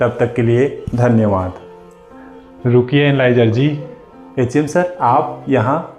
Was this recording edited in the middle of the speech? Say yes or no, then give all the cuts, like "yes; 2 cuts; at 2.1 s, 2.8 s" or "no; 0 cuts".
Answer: no; 0 cuts